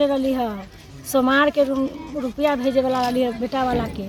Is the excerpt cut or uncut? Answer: uncut